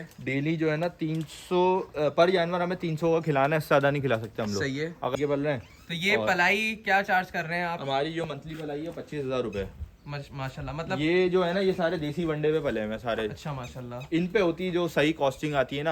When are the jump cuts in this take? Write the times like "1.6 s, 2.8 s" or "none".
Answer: 5.1 s